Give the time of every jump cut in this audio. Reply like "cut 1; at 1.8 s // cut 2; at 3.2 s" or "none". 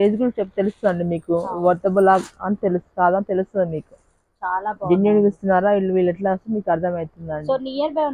none